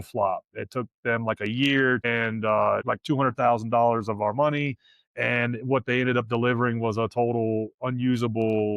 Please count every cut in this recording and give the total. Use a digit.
2